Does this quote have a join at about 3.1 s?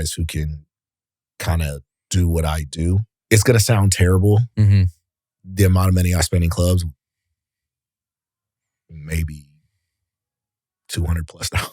yes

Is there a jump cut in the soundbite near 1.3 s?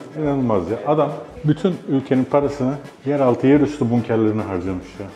yes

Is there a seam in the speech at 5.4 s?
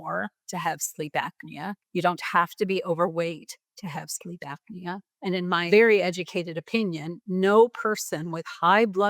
yes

